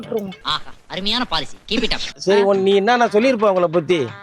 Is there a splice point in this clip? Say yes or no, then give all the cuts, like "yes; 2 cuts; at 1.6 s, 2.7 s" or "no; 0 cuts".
yes; 1 cut; at 2.1 s